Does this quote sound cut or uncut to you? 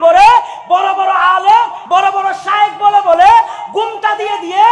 cut